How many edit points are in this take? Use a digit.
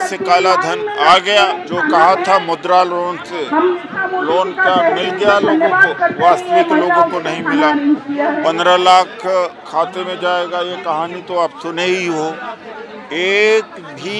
1